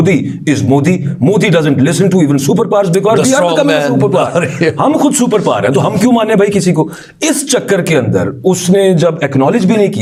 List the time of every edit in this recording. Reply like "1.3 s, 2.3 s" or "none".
none